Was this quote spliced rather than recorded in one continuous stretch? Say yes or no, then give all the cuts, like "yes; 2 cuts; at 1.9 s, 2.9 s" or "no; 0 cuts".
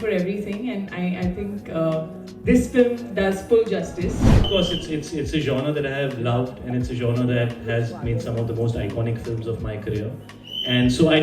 yes; 1 cut; at 4.5 s